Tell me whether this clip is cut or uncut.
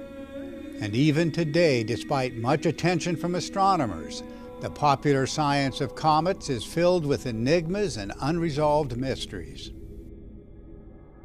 cut